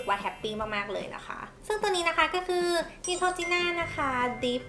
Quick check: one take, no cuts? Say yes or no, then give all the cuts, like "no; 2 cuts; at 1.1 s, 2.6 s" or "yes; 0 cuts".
no; 1 cut; at 1.5 s